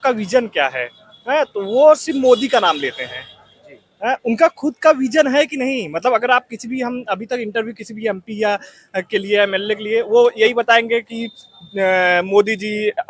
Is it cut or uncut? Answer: uncut